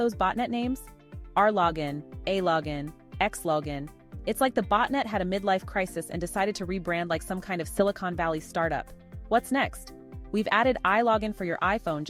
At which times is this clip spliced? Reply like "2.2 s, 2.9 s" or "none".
none

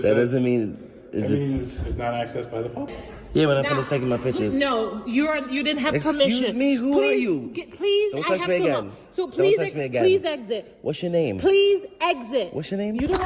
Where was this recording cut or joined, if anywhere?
3.0 s

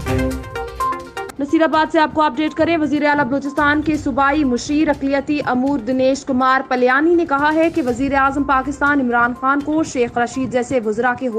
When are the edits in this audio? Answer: 1.2 s

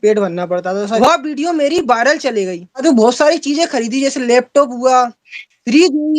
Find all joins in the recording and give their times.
1.0 s, 2.8 s

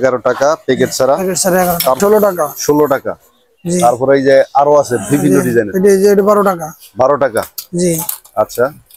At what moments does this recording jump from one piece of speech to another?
2.0 s

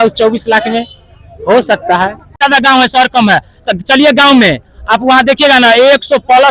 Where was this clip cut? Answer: 2.4 s

